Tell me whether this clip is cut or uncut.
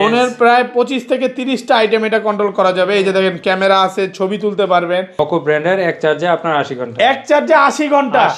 cut